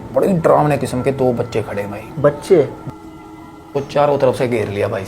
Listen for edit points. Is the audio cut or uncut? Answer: cut